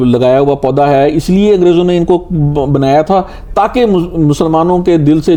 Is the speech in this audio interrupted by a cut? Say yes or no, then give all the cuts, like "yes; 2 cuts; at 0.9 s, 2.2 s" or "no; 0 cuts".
no; 0 cuts